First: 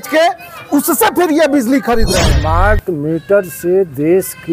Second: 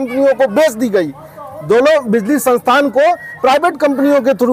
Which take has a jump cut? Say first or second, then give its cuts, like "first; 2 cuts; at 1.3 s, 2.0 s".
first; 1 cut; at 2.2 s